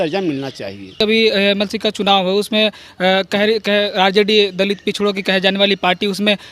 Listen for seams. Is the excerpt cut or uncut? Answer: cut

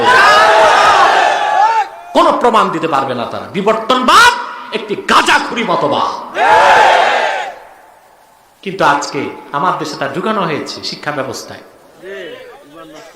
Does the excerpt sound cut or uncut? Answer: uncut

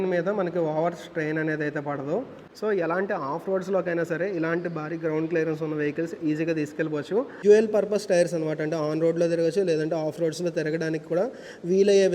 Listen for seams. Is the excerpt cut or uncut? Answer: cut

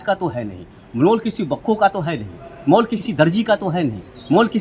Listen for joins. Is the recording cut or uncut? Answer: uncut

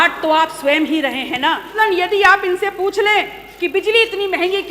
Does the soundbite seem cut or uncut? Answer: cut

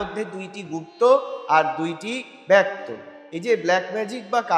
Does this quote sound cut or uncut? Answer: cut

